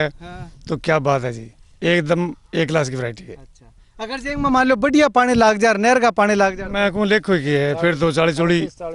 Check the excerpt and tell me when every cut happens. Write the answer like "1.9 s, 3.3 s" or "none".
none